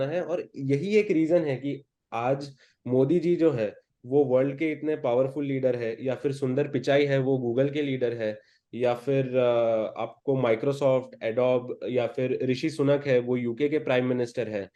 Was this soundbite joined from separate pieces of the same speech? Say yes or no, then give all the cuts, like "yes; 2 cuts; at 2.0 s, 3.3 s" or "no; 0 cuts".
no; 0 cuts